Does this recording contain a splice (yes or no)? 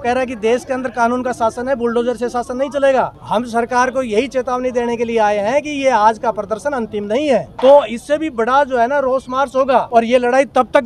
yes